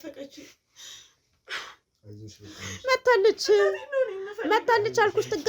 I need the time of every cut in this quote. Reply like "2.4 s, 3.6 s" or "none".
none